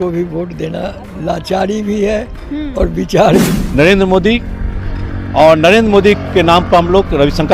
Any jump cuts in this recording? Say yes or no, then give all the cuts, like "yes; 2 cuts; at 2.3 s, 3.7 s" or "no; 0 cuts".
yes; 1 cut; at 3.5 s